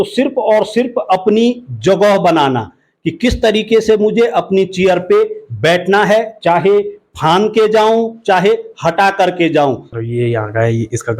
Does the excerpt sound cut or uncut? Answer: cut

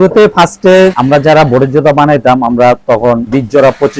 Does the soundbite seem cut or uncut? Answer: uncut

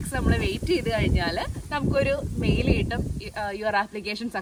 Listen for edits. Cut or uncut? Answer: uncut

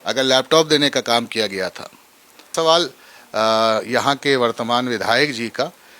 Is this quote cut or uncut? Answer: cut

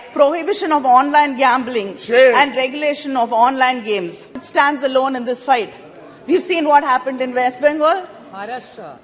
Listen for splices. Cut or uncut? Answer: cut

